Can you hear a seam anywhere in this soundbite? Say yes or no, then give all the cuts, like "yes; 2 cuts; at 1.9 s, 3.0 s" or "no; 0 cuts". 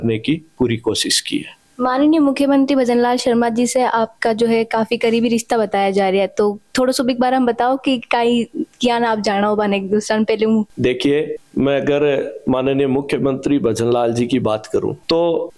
no; 0 cuts